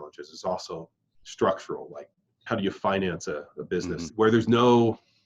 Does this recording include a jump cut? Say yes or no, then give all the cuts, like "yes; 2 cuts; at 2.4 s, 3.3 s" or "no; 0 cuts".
yes; 2 cuts; at 2.4 s, 4.1 s